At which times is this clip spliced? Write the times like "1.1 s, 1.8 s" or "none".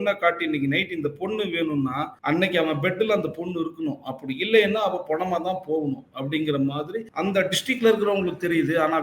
2.1 s, 7.0 s